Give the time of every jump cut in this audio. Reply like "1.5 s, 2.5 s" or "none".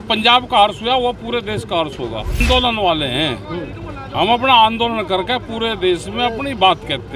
2.4 s

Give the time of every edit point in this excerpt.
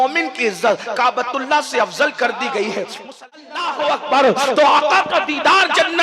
3.3 s

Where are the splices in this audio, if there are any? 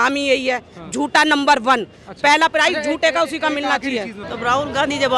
4.2 s

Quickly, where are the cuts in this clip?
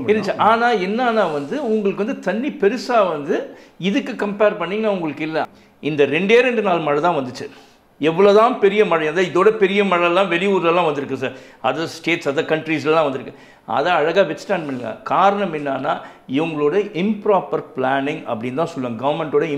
5.5 s

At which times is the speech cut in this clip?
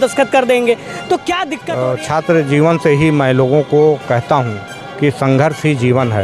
1.6 s

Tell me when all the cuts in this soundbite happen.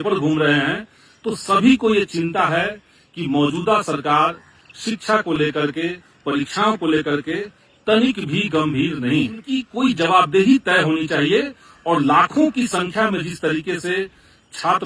9.6 s

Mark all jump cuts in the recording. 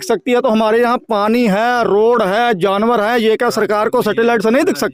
none

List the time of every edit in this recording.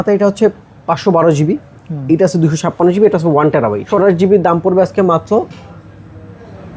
3.9 s

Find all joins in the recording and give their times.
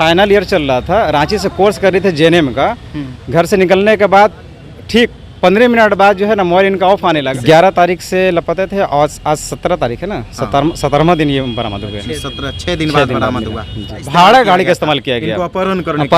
7.3 s, 14.0 s

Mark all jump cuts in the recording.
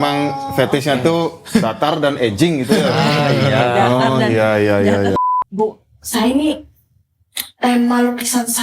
5.2 s

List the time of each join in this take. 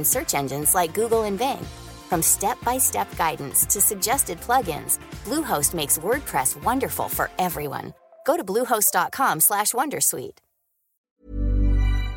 10.9 s

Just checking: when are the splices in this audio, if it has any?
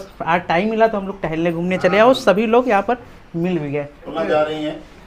4.1 s

